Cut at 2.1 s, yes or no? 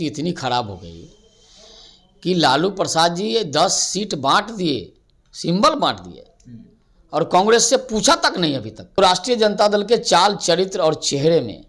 no